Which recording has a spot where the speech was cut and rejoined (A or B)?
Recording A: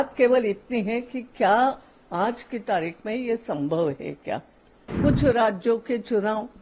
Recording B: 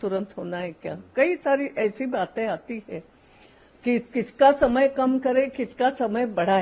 A